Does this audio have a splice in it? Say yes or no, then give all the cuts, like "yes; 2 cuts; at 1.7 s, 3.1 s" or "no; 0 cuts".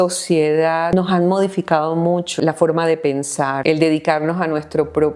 yes; 3 cuts; at 0.9 s, 2.4 s, 3.6 s